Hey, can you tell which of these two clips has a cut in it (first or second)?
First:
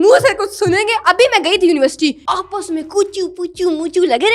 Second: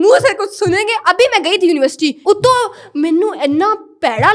first